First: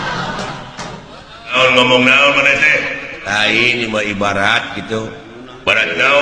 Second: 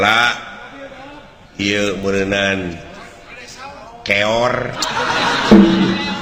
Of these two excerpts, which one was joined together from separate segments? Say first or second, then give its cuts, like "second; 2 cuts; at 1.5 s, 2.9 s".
first; 1 cut; at 1.5 s